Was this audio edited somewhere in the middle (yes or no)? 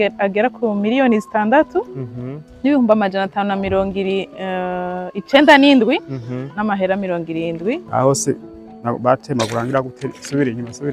yes